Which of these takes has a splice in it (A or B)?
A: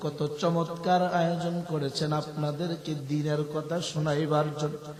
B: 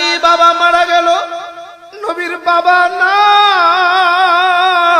B